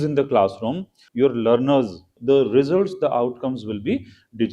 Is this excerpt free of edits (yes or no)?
no